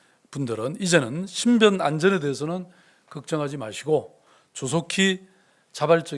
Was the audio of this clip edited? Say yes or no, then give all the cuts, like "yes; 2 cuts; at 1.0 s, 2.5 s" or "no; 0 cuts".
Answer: no; 0 cuts